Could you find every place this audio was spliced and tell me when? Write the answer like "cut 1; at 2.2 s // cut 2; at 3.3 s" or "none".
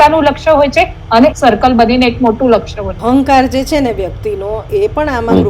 cut 1; at 1.3 s // cut 2; at 2.9 s